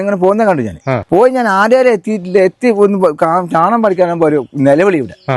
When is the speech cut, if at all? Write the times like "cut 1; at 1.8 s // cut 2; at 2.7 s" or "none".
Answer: cut 1; at 1.0 s